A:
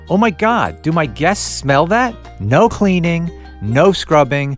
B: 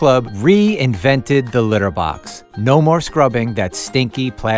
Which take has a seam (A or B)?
A